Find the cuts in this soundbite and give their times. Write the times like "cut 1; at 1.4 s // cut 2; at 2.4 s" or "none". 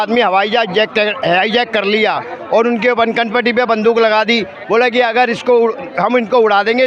none